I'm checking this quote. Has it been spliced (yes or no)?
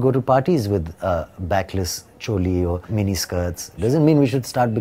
yes